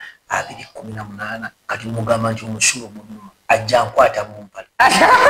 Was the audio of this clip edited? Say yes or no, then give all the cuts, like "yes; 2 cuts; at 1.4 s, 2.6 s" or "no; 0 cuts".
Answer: yes; 1 cut; at 1.6 s